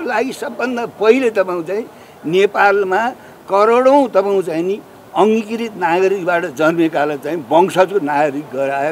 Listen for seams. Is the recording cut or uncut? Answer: uncut